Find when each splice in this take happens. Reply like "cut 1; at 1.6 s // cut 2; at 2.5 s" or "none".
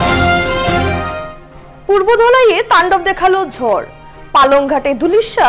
cut 1; at 1.0 s